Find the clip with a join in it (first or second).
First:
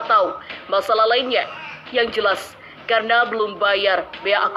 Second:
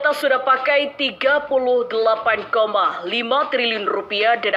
first